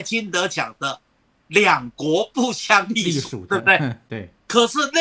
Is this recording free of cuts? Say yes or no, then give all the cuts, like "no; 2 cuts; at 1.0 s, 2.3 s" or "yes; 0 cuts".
no; 1 cut; at 4.1 s